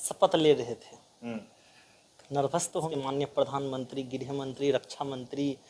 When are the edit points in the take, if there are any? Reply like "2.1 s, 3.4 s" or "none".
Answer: 2.9 s